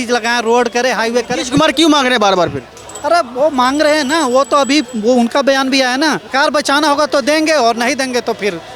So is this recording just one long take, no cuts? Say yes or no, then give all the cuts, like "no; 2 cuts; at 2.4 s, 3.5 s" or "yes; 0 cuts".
no; 1 cut; at 6.3 s